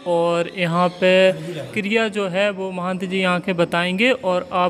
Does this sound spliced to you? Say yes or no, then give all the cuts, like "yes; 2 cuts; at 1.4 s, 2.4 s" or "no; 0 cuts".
yes; 1 cut; at 1.7 s